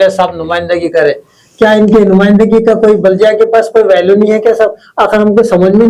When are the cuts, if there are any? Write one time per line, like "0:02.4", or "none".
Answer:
none